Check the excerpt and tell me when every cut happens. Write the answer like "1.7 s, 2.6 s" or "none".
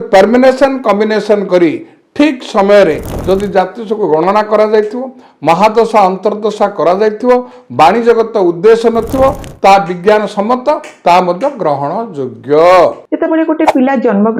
13.0 s